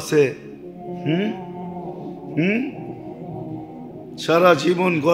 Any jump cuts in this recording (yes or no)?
no